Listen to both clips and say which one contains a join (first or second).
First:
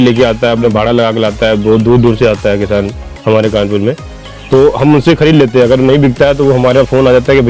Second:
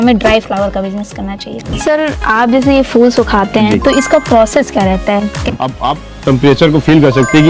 second